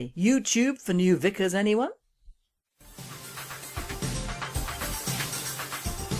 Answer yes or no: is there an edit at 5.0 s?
yes